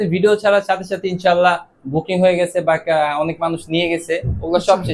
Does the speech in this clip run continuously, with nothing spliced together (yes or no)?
yes